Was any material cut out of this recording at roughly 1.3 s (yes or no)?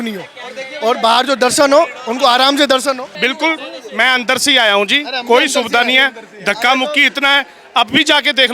no